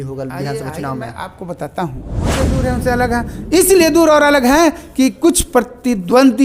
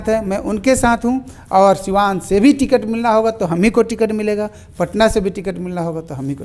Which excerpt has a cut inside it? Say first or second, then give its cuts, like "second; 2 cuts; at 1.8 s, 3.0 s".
first; 1 cut; at 2.3 s